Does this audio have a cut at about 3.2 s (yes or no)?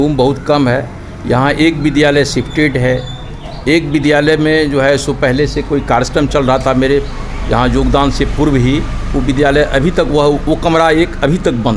no